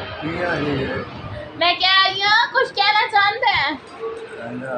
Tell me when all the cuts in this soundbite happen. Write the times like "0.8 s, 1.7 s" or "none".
1.5 s